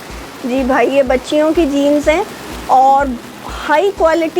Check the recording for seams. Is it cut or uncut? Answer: uncut